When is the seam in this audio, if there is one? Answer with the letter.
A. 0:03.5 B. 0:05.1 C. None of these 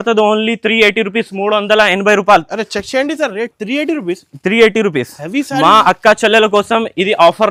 C